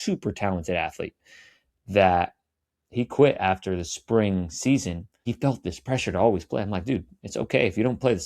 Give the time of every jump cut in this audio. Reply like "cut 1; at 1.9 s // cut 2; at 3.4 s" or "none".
cut 1; at 5.2 s